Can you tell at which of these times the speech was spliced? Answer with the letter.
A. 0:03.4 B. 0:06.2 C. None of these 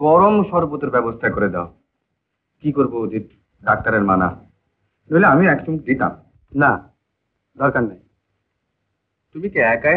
C